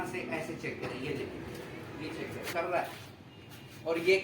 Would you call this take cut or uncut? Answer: cut